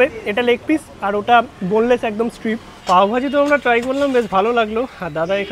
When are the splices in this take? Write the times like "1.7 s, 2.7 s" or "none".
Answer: 2.7 s